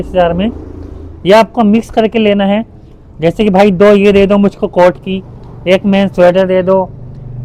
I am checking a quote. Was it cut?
no; 0 cuts

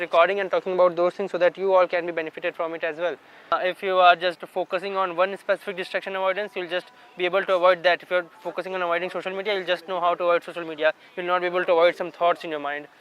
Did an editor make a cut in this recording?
yes; 1 cut; at 3.5 s

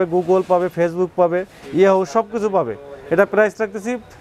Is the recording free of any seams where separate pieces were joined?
yes; 0 cuts

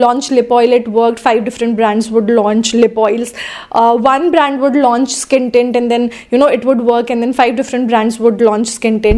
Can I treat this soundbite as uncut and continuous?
yes; 0 cuts

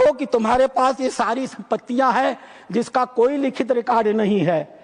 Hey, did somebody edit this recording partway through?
no; 0 cuts

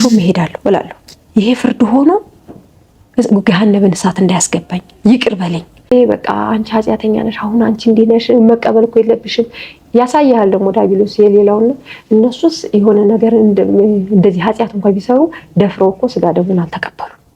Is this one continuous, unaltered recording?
no; 1 cut; at 5.9 s

